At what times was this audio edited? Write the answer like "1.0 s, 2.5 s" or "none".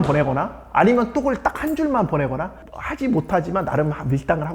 2.6 s